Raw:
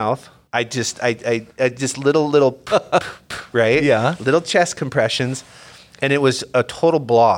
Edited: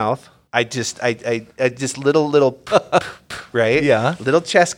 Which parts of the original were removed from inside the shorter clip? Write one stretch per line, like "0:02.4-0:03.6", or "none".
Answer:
none